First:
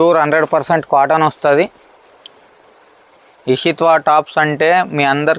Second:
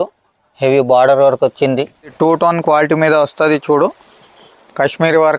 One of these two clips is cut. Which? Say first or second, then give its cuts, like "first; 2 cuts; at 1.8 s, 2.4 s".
second; 1 cut; at 2.1 s